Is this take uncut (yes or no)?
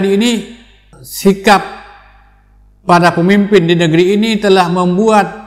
no